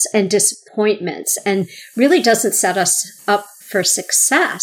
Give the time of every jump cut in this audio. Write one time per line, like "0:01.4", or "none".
0:03.6